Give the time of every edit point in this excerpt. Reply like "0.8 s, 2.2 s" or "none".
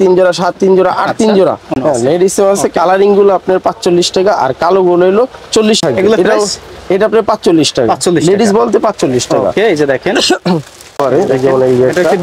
1.7 s, 5.8 s, 11.0 s